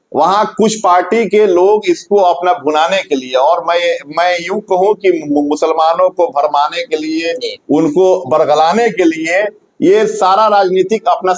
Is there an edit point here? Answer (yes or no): no